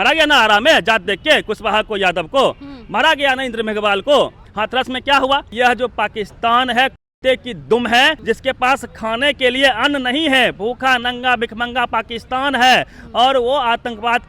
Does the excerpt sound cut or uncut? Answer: cut